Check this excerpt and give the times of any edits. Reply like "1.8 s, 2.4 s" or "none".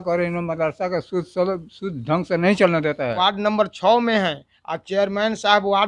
3.2 s